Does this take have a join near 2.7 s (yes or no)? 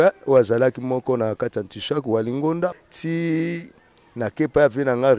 yes